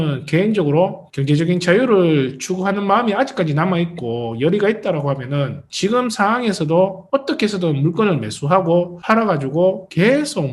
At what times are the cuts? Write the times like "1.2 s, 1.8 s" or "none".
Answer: 1.0 s